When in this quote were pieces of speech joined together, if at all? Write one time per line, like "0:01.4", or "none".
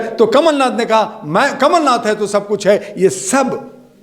none